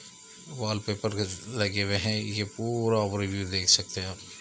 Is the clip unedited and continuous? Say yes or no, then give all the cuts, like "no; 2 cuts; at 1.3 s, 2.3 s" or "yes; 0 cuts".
yes; 0 cuts